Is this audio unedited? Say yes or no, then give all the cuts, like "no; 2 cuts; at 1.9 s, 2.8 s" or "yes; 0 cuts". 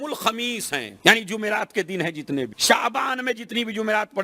no; 2 cuts; at 0.9 s, 2.6 s